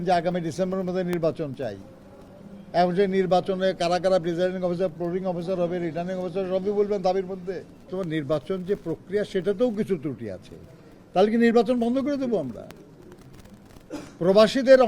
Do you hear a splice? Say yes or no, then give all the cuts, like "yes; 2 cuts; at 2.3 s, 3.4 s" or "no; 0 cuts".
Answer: yes; 1 cut; at 7.8 s